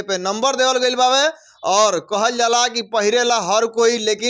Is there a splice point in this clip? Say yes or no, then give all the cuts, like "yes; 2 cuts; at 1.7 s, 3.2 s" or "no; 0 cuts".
no; 0 cuts